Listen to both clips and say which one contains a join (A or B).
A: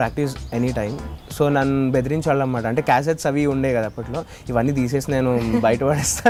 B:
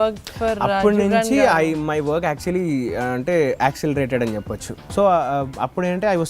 B